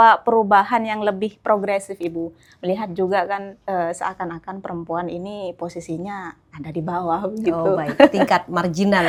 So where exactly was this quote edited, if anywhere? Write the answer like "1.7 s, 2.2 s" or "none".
none

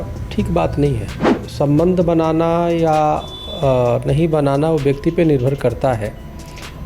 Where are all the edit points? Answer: 1.4 s

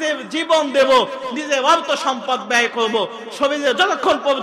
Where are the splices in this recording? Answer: 1.3 s

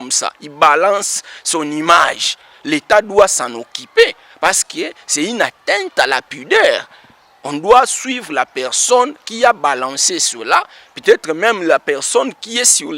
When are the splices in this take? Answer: none

